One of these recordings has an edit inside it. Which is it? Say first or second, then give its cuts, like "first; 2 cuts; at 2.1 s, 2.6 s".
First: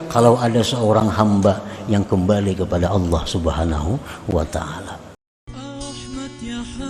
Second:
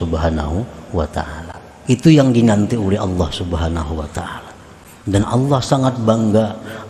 first; 1 cut; at 5.4 s